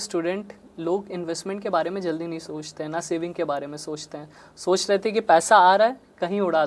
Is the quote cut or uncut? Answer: uncut